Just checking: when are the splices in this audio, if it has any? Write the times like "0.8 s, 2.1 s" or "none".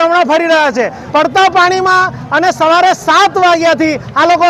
1.0 s